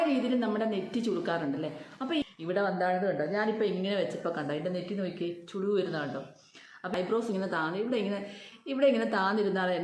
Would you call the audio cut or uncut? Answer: cut